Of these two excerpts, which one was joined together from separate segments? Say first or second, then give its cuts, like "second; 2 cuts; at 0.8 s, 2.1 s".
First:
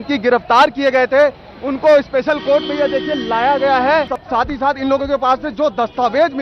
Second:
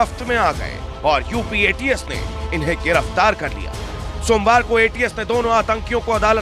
first; 1 cut; at 4.2 s